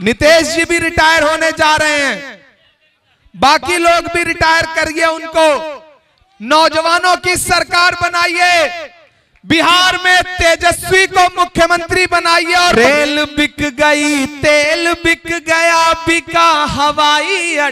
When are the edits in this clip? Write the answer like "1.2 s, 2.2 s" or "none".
12.7 s